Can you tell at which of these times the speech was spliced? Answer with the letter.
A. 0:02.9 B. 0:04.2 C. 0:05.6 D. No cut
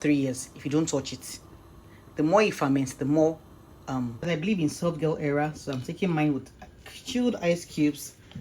B